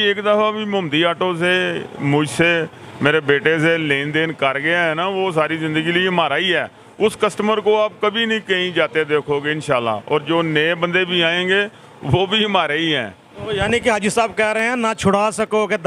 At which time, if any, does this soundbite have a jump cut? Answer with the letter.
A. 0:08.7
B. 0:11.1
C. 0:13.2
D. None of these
D